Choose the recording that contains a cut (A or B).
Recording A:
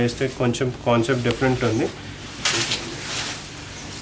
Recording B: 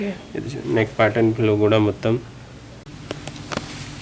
B